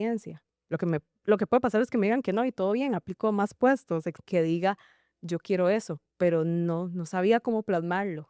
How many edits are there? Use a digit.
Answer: 1